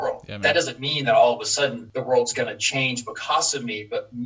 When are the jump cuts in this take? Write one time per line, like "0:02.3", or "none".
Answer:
0:01.9